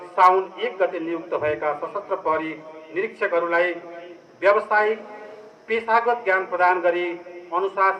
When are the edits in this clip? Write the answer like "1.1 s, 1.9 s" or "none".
none